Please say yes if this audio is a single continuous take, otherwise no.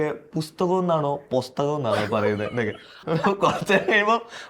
no